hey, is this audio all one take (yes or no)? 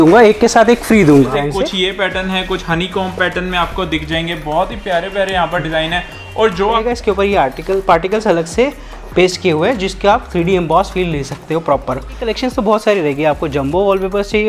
no